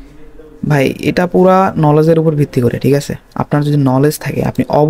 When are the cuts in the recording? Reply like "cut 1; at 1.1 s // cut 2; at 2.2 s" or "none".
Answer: none